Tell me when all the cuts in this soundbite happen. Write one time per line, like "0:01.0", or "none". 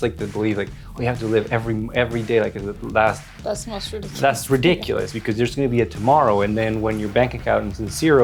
none

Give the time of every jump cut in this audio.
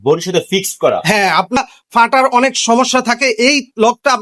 0:01.6

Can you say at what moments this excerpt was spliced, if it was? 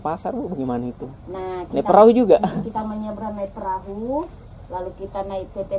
none

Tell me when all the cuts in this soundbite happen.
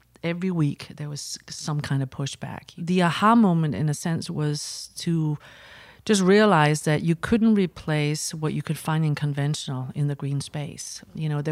0:02.7

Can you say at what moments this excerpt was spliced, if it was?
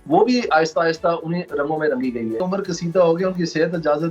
0:02.4

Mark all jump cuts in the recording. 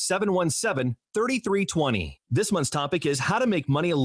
0:00.9
0:02.1

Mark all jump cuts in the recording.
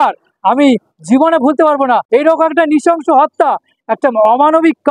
0:02.0

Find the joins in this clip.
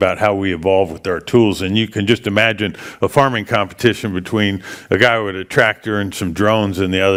none

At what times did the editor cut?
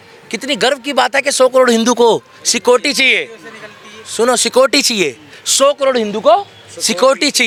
none

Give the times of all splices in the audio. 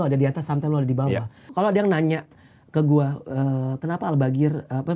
0:01.5

